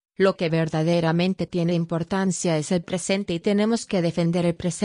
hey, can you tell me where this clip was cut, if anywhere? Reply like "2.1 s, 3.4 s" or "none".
2.8 s